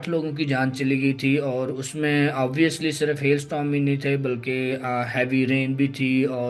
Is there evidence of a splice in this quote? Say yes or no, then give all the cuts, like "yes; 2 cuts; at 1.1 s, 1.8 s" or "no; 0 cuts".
no; 0 cuts